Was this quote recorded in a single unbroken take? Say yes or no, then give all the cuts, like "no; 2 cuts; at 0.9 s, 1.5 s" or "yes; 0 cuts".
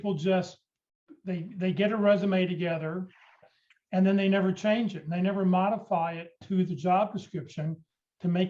no; 1 cut; at 3.5 s